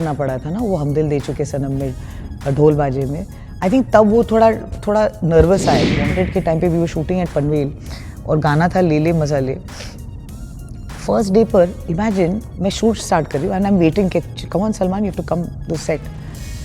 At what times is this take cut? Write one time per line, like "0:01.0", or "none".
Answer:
0:06.0